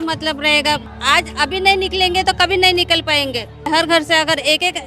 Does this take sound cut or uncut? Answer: cut